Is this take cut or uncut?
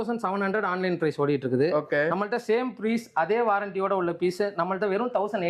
uncut